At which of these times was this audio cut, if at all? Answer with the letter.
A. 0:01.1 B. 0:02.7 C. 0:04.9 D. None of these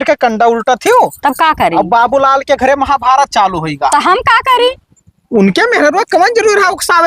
D